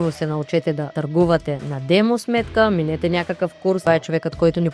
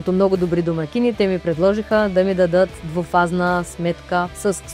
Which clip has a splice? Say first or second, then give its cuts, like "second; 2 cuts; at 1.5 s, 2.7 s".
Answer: first; 2 cuts; at 0.9 s, 3.8 s